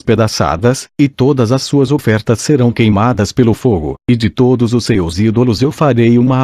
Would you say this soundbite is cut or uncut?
uncut